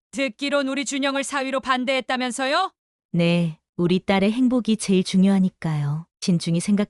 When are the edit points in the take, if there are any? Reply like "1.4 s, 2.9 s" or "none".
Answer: 2.8 s